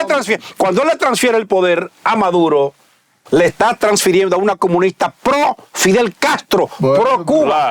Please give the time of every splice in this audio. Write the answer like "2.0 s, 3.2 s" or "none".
none